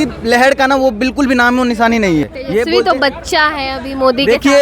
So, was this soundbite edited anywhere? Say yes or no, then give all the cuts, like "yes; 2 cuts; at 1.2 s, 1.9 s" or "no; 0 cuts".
yes; 1 cut; at 2.3 s